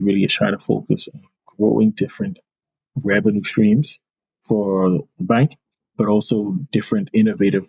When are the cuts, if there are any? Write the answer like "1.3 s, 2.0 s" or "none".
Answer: none

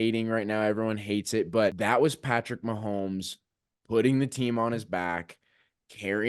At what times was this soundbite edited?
1.8 s

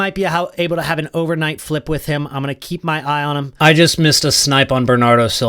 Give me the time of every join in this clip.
3.5 s

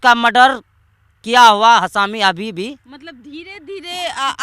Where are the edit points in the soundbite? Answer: none

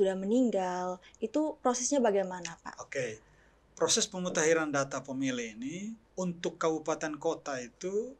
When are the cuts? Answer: 6.0 s

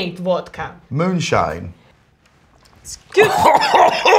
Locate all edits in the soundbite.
none

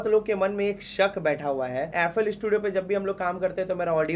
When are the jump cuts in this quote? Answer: 1.9 s

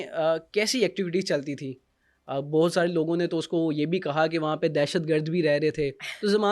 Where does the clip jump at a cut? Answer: none

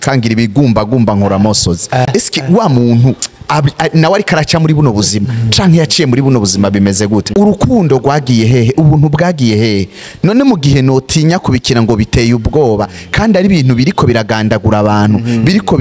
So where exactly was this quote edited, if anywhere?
2.1 s, 7.3 s

